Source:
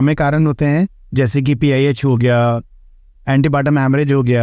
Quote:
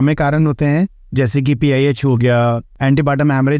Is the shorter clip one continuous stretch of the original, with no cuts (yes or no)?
no